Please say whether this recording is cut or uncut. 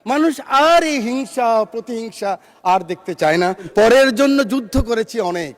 cut